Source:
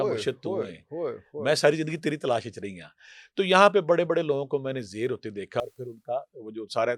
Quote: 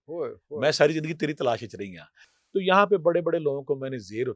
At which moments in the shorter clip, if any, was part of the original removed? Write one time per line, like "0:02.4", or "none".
none